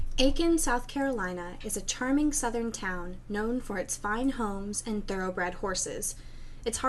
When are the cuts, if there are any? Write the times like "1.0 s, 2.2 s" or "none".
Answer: 5.0 s